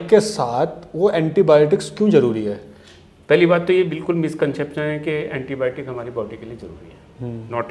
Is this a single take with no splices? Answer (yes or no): yes